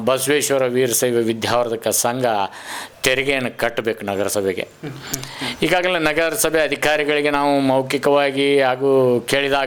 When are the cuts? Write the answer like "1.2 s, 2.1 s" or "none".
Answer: none